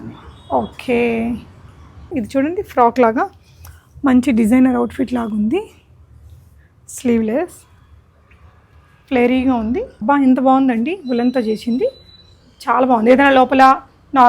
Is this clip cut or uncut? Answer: cut